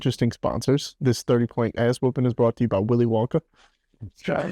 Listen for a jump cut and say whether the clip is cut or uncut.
cut